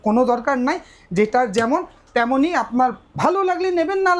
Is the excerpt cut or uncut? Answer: uncut